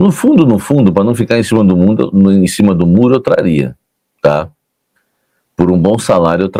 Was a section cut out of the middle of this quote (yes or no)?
no